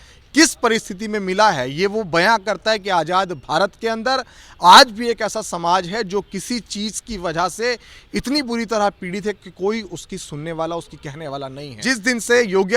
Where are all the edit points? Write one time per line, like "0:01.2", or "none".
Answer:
0:11.7